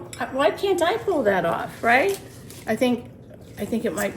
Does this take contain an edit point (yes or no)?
no